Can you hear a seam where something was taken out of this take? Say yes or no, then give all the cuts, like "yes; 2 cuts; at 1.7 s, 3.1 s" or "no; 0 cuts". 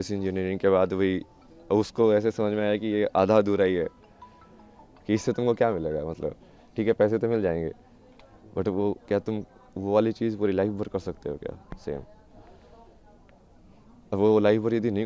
no; 0 cuts